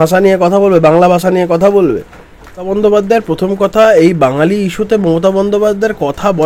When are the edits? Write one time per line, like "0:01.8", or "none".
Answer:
0:02.7